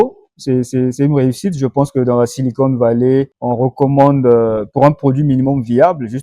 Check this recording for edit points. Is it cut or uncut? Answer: cut